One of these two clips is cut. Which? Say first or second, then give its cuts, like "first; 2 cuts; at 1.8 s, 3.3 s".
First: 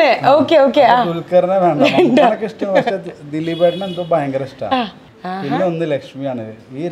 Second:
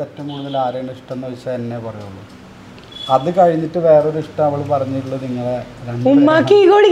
first; 1 cut; at 5.0 s